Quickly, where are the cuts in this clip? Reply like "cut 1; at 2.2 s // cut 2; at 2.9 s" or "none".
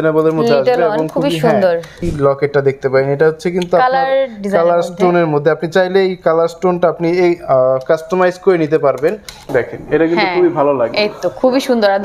cut 1; at 2.0 s // cut 2; at 9.3 s